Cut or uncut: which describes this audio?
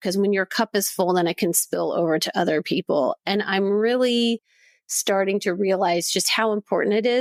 uncut